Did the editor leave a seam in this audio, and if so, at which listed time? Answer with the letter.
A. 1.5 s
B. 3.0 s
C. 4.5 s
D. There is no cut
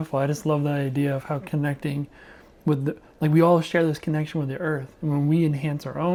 D